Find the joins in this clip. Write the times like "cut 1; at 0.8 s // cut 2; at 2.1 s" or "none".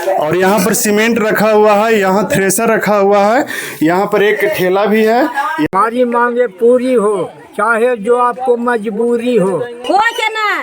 cut 1; at 5.7 s // cut 2; at 9.8 s